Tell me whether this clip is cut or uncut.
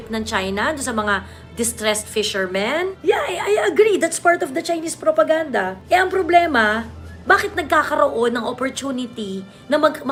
uncut